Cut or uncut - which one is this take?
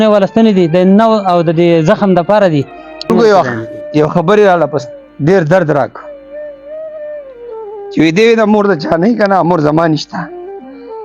cut